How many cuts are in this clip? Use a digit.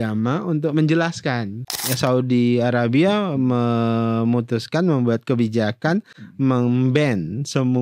1